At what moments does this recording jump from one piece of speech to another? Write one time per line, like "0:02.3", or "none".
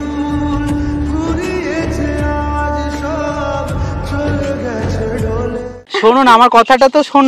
0:05.7